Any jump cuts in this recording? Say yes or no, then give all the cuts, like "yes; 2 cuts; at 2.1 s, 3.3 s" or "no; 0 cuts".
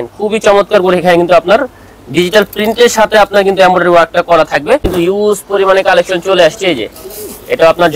yes; 1 cut; at 4.9 s